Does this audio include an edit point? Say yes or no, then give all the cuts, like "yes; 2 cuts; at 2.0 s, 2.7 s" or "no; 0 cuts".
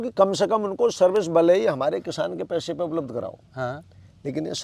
no; 0 cuts